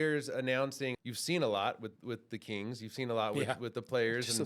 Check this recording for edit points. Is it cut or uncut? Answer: cut